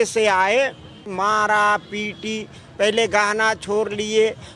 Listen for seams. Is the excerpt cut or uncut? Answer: cut